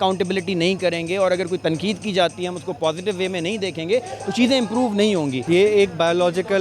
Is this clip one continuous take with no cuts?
no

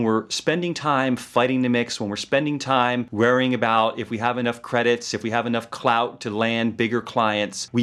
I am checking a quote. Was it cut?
no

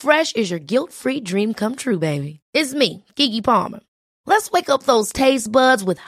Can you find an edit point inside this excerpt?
no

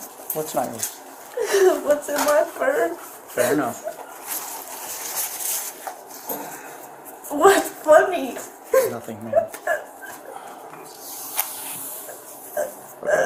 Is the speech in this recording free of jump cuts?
yes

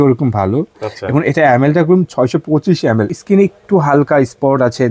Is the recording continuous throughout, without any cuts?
no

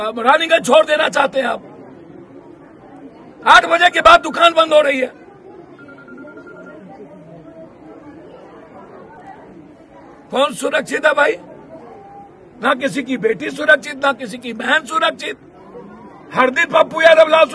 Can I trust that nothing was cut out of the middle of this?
yes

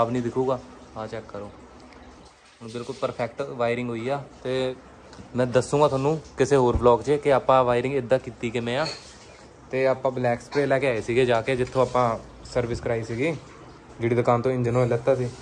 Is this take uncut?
yes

